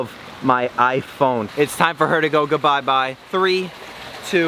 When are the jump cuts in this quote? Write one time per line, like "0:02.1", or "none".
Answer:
0:01.5